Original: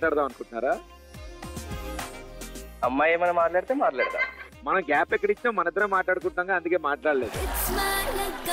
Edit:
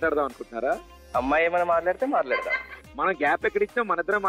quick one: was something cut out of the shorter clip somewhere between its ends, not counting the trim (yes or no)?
yes